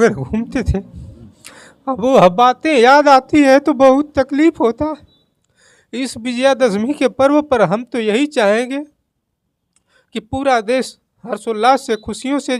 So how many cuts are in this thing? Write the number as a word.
zero